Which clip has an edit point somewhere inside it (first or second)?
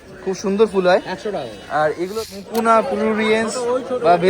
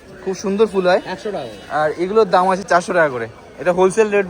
first